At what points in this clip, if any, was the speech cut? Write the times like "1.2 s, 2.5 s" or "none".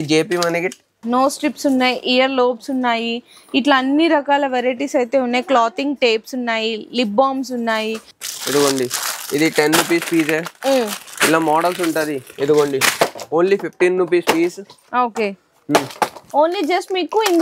0.9 s, 8.1 s, 16.2 s